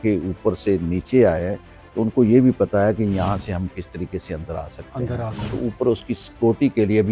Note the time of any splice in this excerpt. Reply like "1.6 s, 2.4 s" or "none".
5.6 s

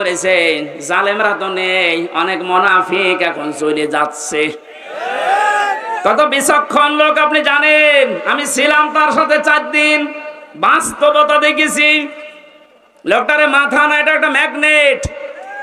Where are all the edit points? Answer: none

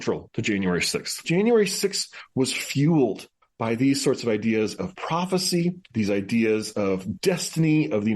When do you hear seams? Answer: 1.2 s

